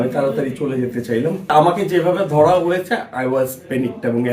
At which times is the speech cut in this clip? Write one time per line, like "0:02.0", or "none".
0:01.5